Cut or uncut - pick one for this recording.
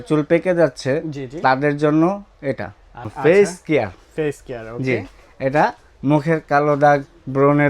cut